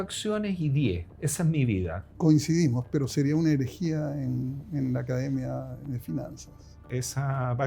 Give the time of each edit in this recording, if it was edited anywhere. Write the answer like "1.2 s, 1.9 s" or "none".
2.2 s, 6.9 s